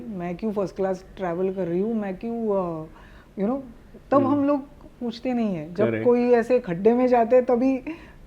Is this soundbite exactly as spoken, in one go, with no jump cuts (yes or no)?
yes